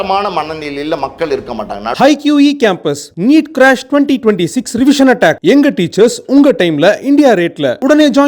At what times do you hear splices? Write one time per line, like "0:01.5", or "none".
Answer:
0:01.9